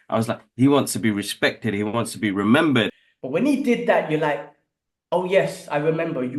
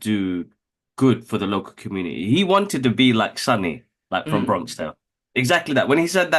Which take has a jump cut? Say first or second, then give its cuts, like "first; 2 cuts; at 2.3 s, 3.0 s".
first; 1 cut; at 2.9 s